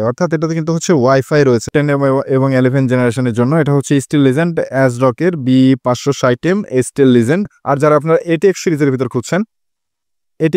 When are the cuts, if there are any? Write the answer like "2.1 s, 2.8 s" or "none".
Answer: 1.6 s, 7.5 s